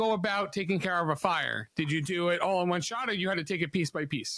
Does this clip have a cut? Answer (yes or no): no